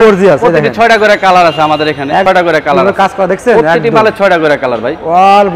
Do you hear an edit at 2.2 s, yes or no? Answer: yes